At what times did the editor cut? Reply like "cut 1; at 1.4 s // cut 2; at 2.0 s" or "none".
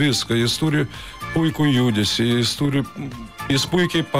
none